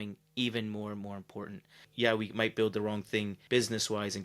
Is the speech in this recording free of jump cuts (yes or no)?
no